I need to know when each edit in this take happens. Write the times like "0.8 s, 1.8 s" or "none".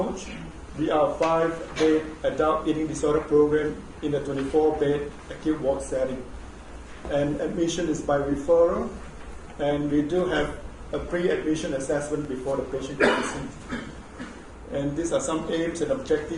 3.9 s